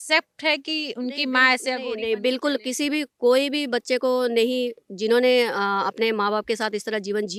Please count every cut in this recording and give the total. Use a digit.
0